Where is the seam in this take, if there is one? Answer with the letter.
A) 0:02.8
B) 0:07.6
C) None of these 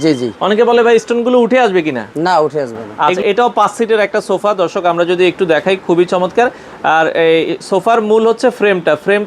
A